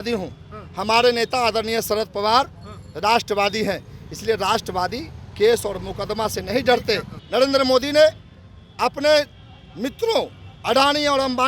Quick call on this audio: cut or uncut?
cut